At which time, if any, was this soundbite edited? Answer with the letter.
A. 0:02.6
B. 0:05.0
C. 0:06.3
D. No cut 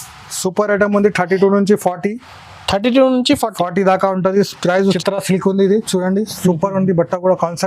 B